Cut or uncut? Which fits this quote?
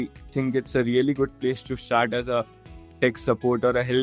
uncut